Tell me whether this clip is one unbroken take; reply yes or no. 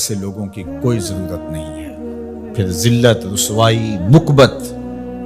no